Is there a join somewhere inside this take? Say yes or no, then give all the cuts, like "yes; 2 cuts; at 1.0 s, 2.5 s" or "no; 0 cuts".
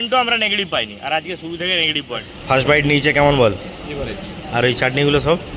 yes; 1 cut; at 2.3 s